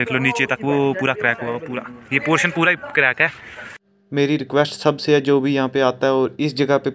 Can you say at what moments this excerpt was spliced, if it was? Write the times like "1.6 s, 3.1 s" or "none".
none

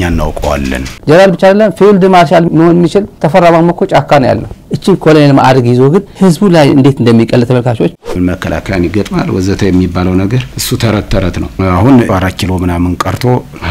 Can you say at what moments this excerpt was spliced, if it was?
0.9 s, 4.6 s, 8.0 s

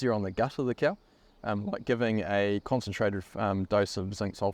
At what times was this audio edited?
none

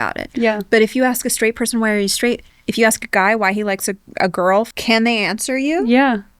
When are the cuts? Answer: 2.5 s, 4.7 s

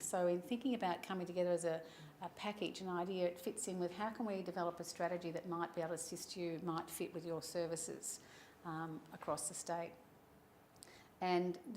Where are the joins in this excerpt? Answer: 8.4 s

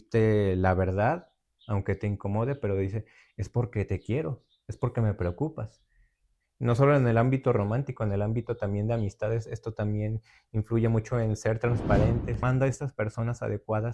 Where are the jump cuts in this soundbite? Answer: 12.4 s

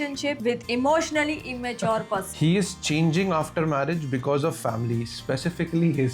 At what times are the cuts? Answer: 2.3 s

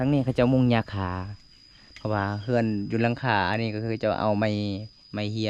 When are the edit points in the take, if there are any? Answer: none

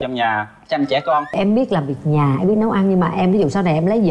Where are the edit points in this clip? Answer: 1.3 s

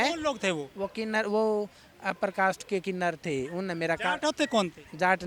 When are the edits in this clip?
none

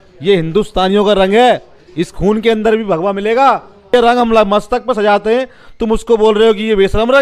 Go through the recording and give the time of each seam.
3.9 s

